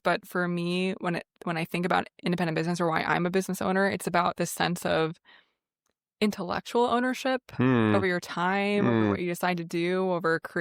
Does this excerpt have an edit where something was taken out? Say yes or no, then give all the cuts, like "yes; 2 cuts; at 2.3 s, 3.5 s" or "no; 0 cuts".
no; 0 cuts